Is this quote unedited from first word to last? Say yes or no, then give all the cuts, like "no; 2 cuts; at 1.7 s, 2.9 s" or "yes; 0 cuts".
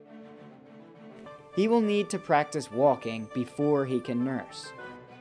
yes; 0 cuts